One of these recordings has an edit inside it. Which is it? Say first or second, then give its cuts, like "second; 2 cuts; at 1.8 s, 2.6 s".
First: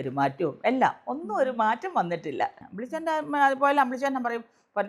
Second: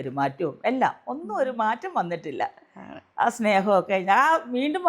first; 1 cut; at 2.7 s